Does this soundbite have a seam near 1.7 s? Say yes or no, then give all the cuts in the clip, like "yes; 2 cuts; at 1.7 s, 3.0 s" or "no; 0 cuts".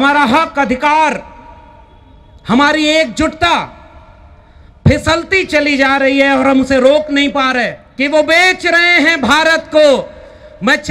no; 1 cut; at 7.8 s